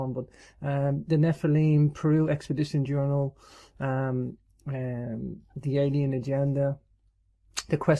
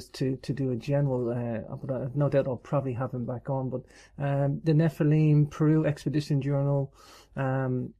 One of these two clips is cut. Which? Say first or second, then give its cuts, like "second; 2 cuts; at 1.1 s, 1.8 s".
second; 1 cut; at 2.1 s